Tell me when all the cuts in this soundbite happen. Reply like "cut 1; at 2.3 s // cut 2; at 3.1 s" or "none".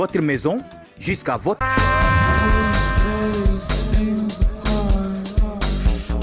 cut 1; at 1.6 s